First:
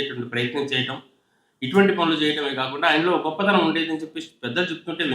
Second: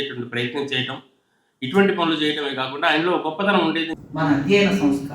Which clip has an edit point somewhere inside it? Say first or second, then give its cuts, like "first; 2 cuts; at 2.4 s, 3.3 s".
second; 1 cut; at 4.0 s